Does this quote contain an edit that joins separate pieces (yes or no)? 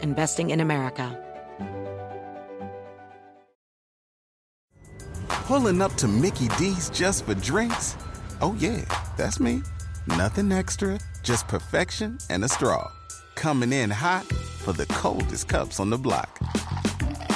yes